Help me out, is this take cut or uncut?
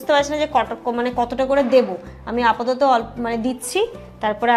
uncut